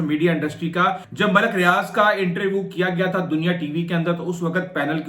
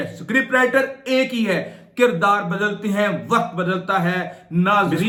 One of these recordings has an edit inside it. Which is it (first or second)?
first